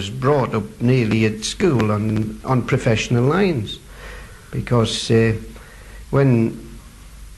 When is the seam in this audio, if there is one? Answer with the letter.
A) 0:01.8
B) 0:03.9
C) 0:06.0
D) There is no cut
A